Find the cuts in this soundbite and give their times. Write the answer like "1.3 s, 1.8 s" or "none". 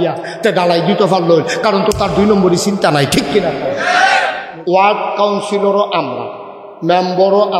4.4 s